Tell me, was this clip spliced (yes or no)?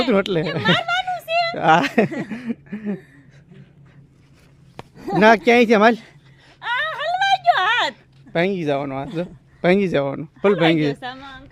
no